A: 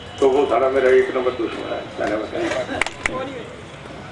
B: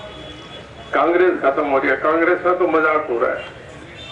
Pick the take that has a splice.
A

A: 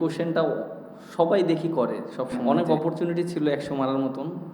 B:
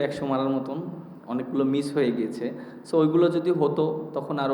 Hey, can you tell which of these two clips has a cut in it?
A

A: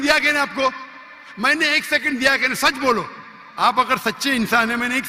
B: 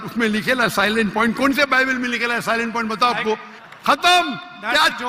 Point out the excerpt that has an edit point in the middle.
B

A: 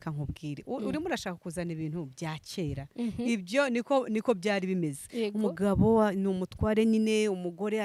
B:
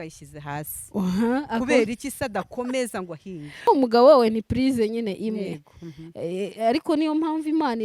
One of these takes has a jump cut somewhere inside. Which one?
B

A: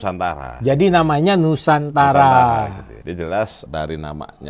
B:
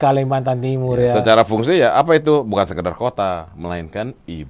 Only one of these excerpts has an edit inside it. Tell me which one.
A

